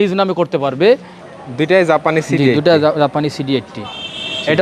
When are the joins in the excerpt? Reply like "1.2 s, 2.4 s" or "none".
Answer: 1.1 s